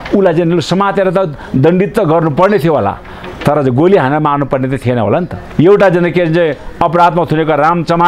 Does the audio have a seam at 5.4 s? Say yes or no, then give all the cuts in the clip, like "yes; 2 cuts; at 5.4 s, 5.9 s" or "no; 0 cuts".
yes; 1 cut; at 5.4 s